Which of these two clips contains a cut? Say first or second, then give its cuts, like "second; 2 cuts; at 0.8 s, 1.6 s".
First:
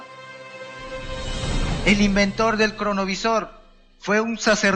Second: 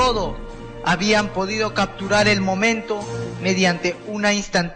second; 1 cut; at 2.9 s